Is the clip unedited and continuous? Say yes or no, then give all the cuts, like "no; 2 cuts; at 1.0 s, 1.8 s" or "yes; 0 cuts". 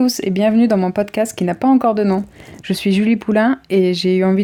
yes; 0 cuts